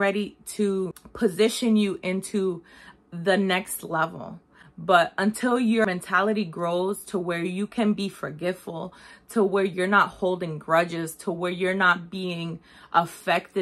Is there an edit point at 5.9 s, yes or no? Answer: yes